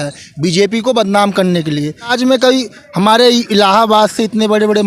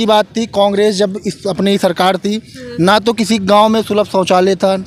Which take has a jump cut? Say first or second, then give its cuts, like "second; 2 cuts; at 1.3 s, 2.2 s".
first; 1 cut; at 2.1 s